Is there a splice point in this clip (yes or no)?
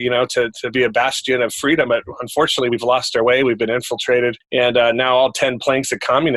yes